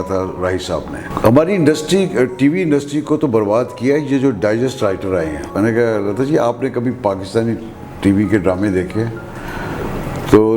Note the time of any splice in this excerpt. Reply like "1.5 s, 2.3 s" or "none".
1.1 s, 5.5 s